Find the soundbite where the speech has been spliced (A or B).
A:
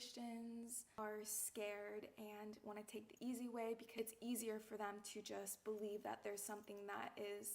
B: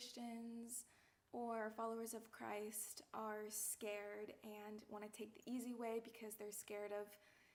A